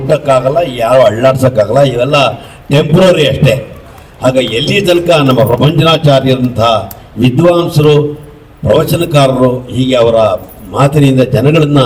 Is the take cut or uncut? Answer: uncut